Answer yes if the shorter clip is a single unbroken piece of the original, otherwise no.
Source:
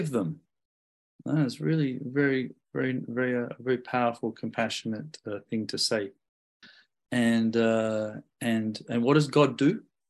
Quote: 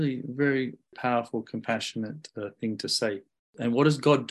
no